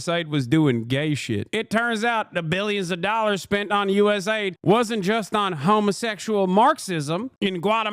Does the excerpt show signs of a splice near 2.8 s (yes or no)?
no